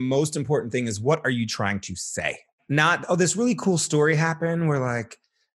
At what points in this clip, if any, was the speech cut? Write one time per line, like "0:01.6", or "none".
0:02.6